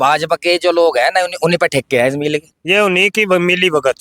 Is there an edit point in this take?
yes; 1 cut; at 2.4 s

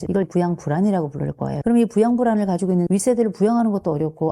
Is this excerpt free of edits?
no; 1 cut; at 2.9 s

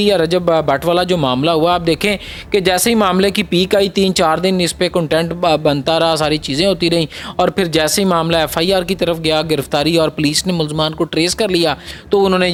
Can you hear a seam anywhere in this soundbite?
no; 0 cuts

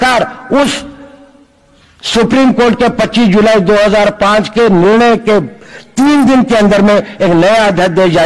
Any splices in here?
no; 0 cuts

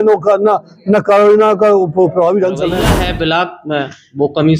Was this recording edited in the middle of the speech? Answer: yes; 1 cut; at 2.9 s

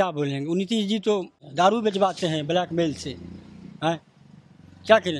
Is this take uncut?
no; 1 cut; at 1.4 s

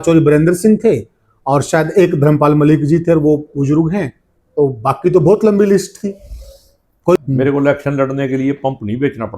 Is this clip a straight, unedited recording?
no; 1 cut; at 7.2 s

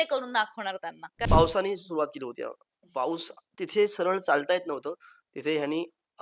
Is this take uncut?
no; 1 cut; at 1.1 s

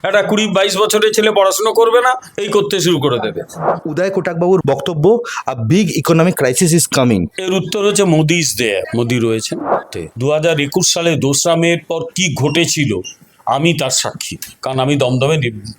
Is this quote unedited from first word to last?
no; 2 cuts; at 3.8 s, 9.9 s

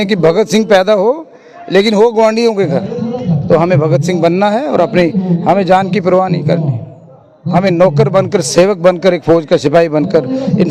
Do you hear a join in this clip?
no; 0 cuts

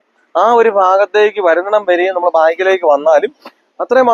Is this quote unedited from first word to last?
yes; 0 cuts

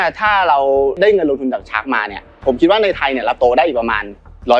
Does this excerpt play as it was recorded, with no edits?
yes; 0 cuts

